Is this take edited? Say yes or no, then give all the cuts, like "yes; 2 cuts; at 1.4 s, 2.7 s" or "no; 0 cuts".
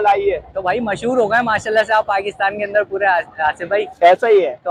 no; 0 cuts